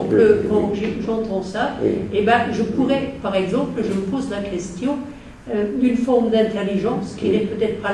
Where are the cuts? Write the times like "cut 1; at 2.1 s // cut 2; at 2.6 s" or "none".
cut 1; at 1.4 s